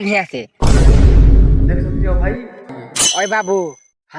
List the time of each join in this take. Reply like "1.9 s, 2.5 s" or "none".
2.8 s